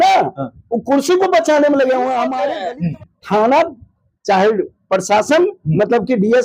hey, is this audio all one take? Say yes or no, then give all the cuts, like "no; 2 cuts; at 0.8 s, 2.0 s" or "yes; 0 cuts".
no; 1 cut; at 2.4 s